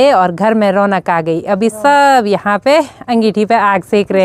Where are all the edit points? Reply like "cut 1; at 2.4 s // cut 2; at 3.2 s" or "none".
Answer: none